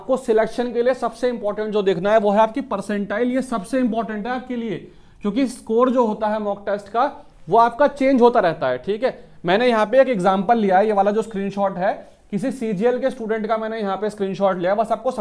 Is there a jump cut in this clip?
no; 0 cuts

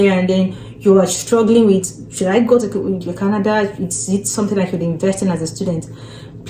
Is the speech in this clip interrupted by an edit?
no; 0 cuts

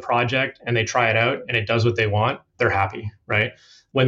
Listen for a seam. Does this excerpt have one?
no; 0 cuts

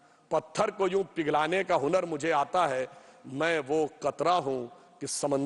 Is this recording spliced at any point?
no; 0 cuts

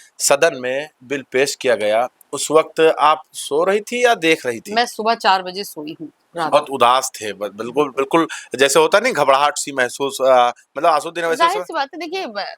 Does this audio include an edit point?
yes; 1 cut; at 6.5 s

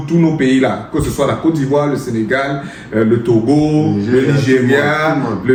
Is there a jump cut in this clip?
no; 0 cuts

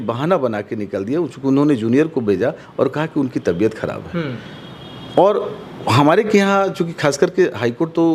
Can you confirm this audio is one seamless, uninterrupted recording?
yes; 0 cuts

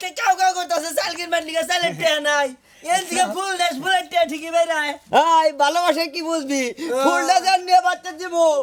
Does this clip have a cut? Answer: no; 0 cuts

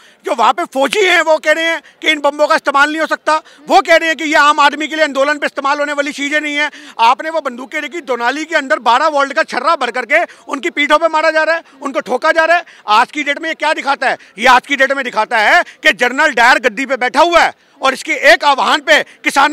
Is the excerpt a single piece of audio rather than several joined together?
yes; 0 cuts

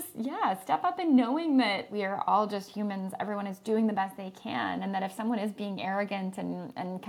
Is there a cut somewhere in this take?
yes; 1 cut; at 1.9 s

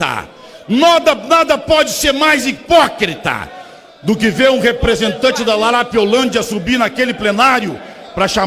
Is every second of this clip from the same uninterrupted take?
yes; 0 cuts

